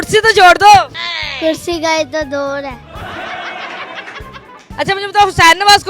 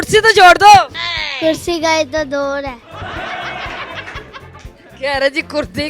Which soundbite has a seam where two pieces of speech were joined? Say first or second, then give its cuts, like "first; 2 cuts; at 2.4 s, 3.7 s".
first; 1 cut; at 4.6 s